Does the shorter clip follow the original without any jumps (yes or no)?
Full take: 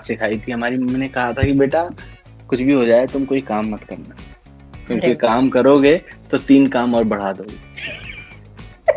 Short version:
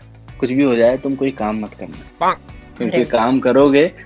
yes